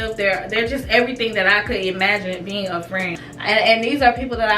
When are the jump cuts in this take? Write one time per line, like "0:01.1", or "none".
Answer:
0:03.1

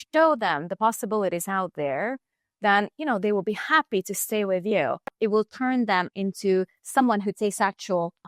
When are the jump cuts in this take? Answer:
0:05.1

